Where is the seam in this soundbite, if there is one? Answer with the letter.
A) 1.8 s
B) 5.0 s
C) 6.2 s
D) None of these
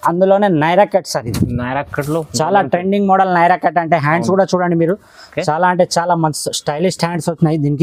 D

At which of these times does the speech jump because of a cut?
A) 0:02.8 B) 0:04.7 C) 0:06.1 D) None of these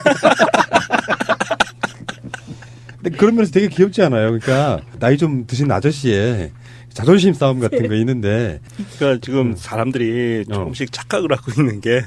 D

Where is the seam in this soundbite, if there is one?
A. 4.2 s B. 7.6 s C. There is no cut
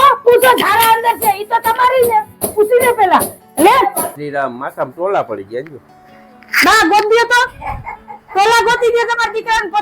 A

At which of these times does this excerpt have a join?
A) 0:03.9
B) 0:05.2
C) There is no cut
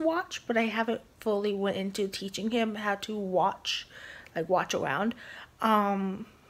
C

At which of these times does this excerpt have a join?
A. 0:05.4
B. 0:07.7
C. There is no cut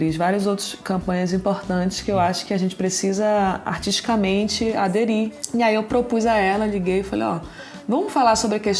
A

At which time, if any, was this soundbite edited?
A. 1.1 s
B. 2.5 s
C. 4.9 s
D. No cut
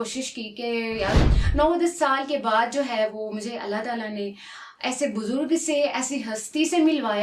A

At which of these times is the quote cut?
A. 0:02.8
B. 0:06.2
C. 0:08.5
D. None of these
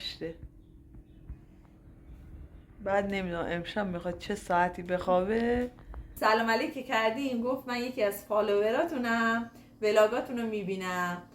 B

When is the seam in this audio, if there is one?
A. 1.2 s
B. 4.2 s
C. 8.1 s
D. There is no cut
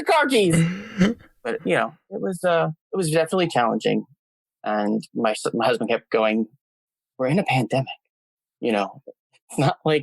B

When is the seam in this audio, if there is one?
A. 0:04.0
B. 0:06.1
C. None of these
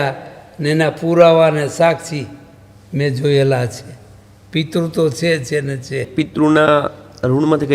B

